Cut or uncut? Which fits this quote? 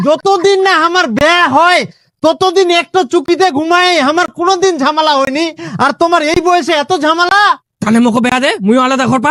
uncut